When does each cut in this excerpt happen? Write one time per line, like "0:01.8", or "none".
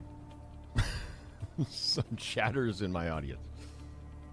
0:01.6
0:03.4